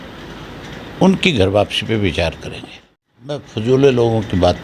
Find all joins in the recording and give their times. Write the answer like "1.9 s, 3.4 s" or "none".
3.5 s